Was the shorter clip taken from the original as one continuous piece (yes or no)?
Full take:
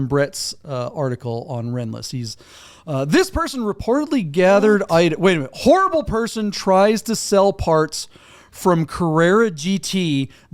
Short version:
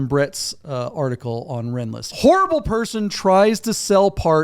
no